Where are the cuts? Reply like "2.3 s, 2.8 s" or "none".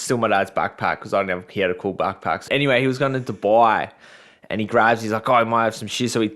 2.5 s